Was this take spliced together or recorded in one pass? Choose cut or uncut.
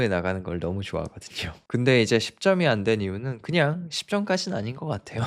cut